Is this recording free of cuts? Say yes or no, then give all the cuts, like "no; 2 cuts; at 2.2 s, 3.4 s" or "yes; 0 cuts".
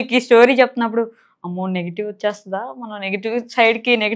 yes; 0 cuts